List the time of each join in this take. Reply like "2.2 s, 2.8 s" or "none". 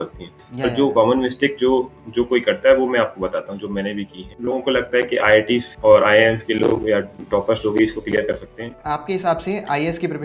4.3 s, 8.8 s